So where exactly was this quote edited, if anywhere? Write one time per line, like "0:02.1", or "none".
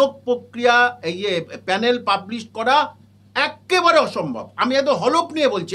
none